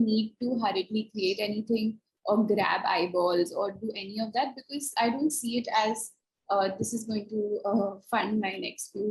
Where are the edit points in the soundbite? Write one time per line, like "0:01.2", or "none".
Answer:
none